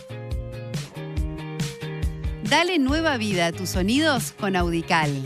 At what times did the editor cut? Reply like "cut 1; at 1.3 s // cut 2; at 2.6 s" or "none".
cut 1; at 2.4 s